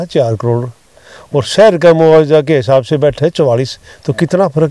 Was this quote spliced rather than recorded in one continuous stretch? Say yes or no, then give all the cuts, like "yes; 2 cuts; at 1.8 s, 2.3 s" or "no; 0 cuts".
no; 0 cuts